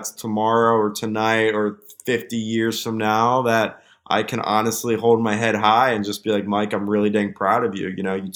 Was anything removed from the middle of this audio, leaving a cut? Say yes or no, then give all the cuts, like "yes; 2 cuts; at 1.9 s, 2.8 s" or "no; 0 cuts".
no; 0 cuts